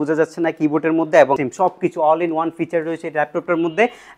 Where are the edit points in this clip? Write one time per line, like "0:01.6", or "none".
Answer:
0:01.5